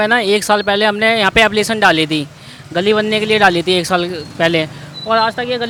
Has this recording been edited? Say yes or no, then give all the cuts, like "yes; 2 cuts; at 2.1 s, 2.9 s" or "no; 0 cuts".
no; 0 cuts